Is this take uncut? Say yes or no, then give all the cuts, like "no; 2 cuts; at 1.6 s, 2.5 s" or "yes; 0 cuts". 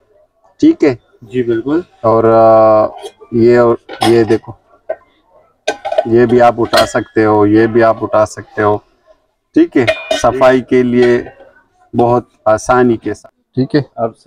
no; 1 cut; at 13.1 s